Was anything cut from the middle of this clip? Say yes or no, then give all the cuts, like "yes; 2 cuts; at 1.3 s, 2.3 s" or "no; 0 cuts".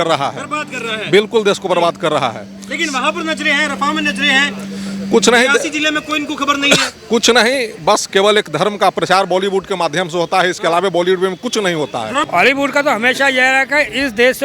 yes; 1 cut; at 12.3 s